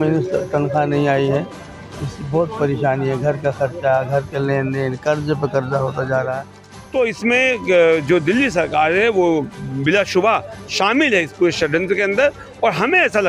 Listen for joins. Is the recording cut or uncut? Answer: cut